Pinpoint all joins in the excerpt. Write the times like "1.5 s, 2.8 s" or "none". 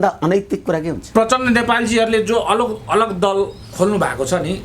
1.0 s